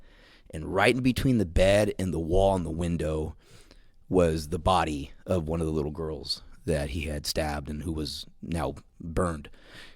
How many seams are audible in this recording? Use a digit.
1